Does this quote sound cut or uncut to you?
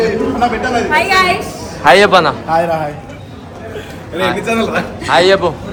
uncut